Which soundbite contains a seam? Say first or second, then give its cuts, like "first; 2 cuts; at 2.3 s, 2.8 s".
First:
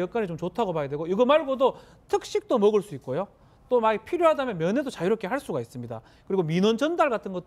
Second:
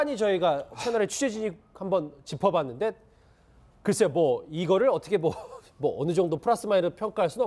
first; 1 cut; at 3.4 s